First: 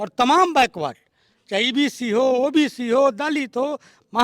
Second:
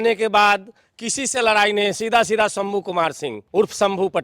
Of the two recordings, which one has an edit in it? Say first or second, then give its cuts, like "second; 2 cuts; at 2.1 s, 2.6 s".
second; 1 cut; at 3.3 s